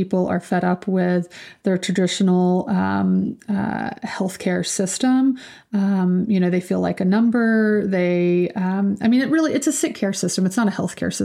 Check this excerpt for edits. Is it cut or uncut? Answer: uncut